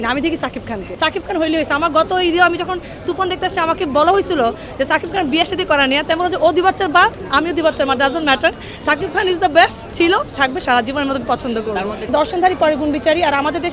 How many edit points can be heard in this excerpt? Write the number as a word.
zero